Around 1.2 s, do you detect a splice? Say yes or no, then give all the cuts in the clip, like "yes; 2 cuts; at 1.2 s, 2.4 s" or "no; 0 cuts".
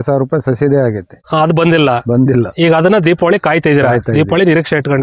yes; 1 cut; at 1.2 s